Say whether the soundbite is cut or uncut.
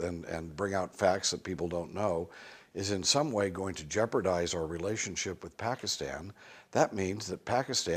cut